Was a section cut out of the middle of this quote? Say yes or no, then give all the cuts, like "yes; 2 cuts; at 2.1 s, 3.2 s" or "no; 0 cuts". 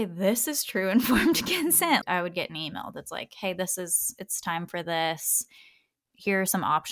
yes; 1 cut; at 2.0 s